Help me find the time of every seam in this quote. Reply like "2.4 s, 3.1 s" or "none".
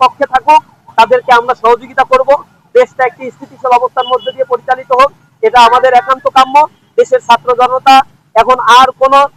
none